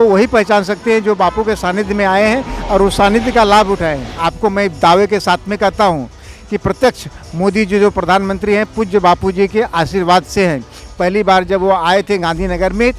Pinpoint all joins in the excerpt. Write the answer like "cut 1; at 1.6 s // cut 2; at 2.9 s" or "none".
none